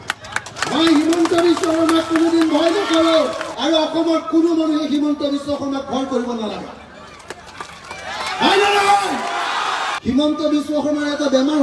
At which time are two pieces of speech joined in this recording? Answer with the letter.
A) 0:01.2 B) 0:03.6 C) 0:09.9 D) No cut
C